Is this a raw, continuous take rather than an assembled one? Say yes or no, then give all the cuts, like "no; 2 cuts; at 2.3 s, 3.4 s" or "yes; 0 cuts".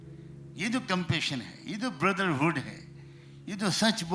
yes; 0 cuts